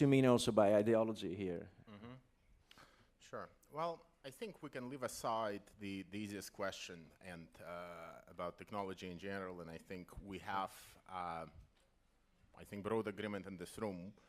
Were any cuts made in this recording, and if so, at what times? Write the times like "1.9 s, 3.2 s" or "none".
4.9 s